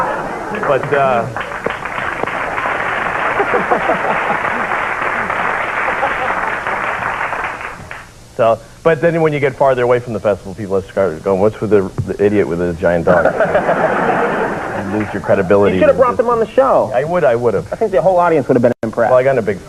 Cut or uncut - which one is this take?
uncut